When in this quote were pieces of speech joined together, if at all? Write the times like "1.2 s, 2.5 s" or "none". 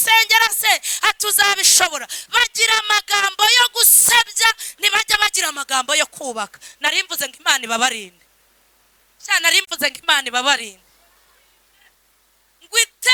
none